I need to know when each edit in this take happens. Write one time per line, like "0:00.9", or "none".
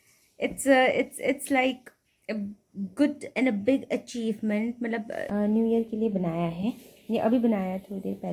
0:05.3